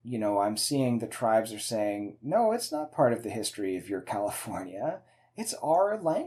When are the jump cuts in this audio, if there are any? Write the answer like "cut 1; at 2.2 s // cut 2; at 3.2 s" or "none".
none